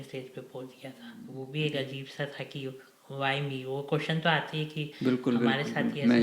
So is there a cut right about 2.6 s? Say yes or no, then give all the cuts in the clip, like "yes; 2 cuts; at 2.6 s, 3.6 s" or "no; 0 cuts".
no; 1 cut; at 1.4 s